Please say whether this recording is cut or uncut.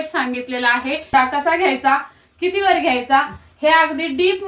cut